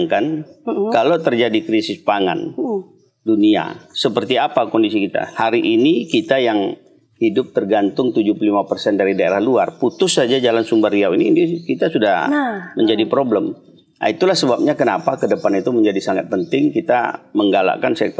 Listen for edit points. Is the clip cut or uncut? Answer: uncut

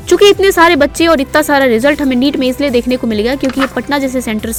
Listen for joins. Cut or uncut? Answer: uncut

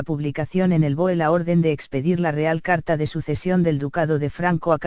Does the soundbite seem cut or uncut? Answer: uncut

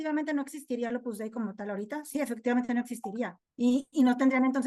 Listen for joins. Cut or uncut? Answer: uncut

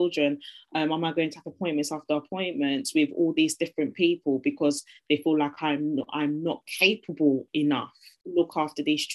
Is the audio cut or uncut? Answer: cut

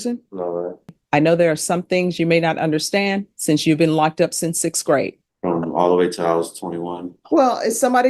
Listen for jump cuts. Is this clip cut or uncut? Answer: cut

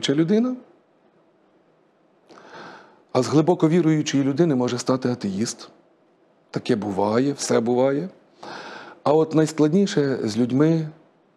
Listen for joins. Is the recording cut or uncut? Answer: uncut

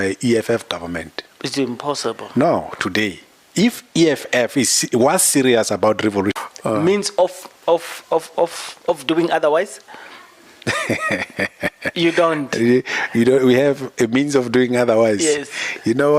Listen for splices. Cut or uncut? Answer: cut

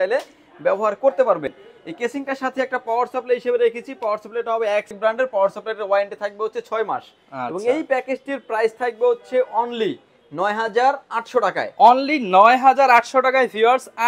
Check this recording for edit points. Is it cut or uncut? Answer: uncut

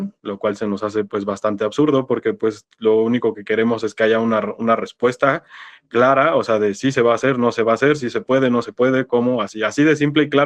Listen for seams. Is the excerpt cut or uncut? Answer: uncut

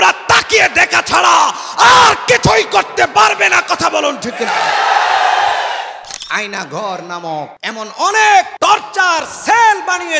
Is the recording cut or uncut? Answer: cut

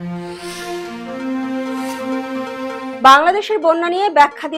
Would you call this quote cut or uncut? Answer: uncut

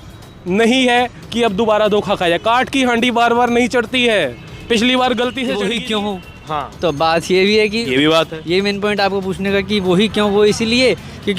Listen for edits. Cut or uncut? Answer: cut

